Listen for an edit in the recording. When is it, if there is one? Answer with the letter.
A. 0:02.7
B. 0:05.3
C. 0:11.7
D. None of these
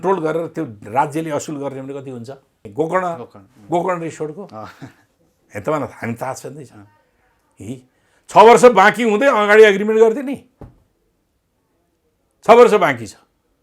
A